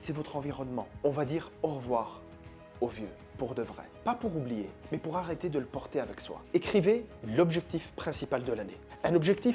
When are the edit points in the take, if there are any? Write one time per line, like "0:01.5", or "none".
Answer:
0:00.9
0:06.3